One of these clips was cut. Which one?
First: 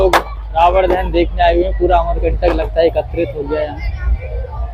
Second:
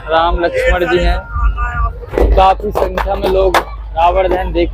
second; 1 cut; at 2.1 s

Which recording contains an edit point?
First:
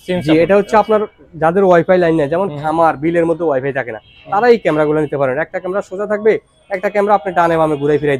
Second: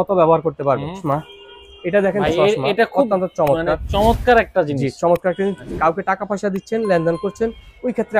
second; 1 cut; at 1.0 s

